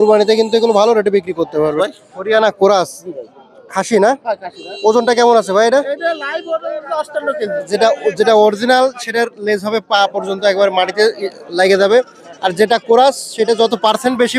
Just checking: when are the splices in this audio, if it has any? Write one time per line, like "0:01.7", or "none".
0:01.8
0:07.6